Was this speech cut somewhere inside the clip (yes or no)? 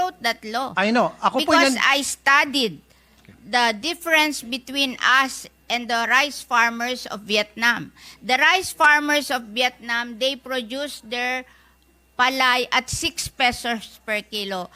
no